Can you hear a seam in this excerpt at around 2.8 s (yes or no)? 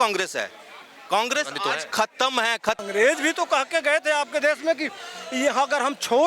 yes